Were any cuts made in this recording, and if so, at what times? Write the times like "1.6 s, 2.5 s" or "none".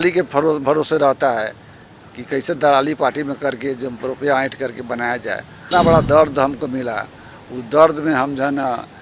5.7 s